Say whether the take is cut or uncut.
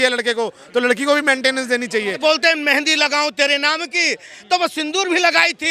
cut